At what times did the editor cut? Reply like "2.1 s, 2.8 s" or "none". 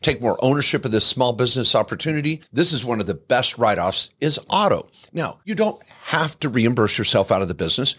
none